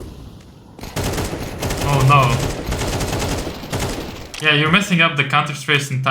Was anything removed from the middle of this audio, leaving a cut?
no; 0 cuts

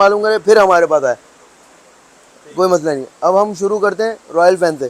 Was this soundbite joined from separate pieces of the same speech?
no; 0 cuts

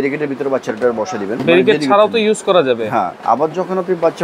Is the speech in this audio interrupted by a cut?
yes; 1 cut; at 1.4 s

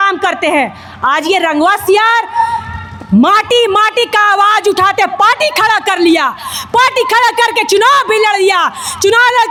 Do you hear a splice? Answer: no; 0 cuts

